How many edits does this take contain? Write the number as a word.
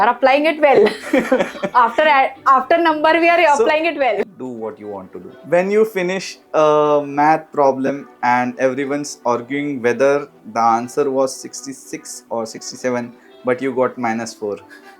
one